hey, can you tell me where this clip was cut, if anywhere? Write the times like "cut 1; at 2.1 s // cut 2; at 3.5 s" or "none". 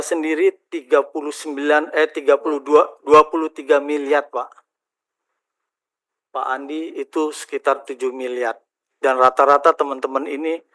none